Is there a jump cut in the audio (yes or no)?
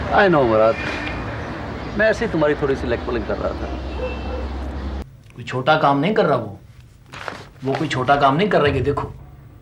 yes